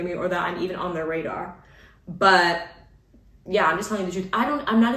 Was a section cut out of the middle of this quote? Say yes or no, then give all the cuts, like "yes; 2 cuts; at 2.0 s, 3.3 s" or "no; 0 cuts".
no; 0 cuts